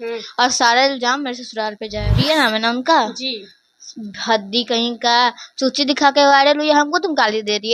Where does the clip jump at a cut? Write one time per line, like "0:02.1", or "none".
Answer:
0:02.1